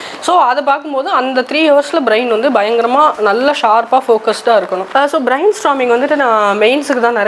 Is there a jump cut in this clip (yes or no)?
yes